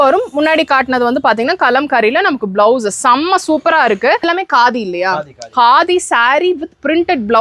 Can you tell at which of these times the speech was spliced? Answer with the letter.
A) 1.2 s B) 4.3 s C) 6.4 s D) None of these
B